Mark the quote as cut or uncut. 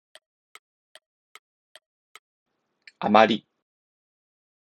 uncut